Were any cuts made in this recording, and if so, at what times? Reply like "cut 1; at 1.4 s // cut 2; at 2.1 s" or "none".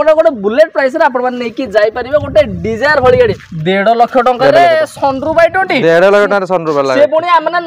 cut 1; at 3.5 s